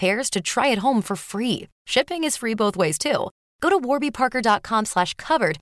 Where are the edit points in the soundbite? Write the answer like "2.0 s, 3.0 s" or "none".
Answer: none